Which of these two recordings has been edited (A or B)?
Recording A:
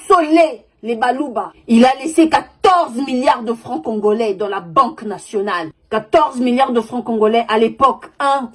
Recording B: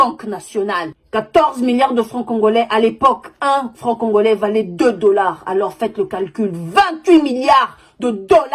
A